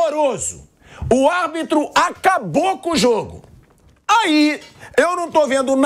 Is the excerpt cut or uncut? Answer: uncut